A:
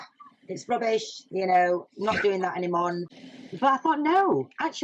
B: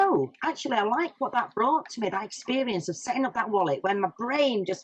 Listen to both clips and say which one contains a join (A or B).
A